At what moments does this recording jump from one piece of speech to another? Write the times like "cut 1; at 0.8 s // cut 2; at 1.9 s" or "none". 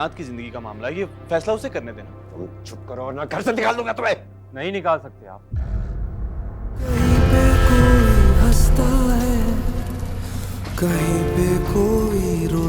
cut 1; at 6.9 s